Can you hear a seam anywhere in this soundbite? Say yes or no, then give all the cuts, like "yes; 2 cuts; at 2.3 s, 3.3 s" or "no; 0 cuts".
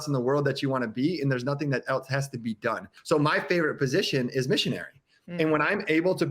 yes; 1 cut; at 2.9 s